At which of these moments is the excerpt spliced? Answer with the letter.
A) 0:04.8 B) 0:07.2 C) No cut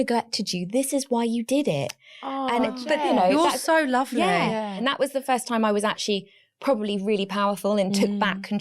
A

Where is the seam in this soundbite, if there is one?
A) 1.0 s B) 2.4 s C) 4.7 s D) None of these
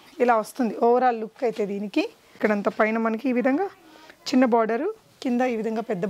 B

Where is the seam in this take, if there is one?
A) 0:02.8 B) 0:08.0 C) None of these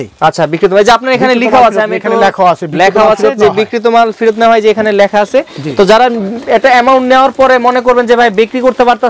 C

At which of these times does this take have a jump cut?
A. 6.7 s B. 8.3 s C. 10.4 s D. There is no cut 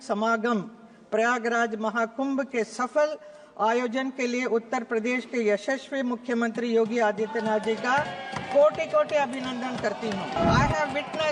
C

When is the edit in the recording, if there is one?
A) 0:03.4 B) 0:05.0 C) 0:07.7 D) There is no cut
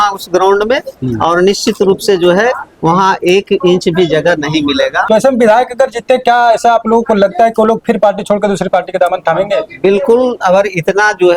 B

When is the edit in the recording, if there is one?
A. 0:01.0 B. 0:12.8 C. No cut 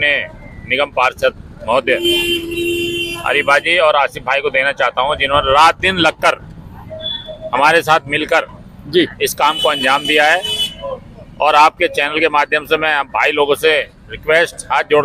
C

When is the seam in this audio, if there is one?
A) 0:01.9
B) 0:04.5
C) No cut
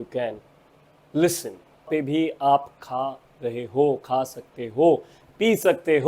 A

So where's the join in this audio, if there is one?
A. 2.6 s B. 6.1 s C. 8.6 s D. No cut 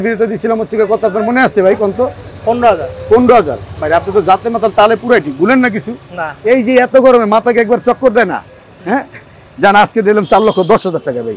D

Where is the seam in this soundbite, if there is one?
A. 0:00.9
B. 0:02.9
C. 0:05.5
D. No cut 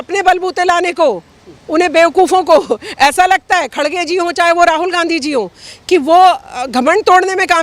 D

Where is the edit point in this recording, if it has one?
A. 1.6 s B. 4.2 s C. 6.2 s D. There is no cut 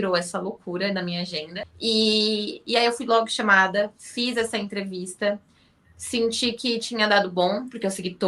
A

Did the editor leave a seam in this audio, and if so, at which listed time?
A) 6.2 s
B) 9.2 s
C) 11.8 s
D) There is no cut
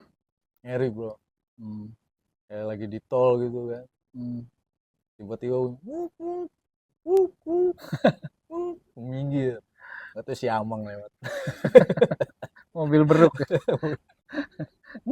D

